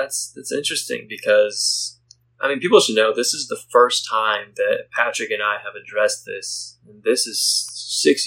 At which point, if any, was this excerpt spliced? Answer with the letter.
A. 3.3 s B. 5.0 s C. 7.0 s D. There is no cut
D